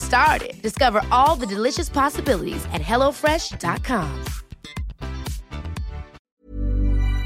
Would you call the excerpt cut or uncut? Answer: cut